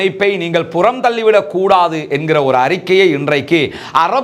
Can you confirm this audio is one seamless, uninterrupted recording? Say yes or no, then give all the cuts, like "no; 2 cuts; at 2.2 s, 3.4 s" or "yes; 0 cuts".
yes; 0 cuts